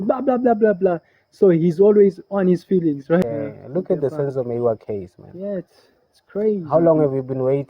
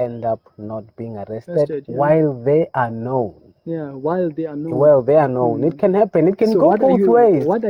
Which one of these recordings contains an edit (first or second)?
first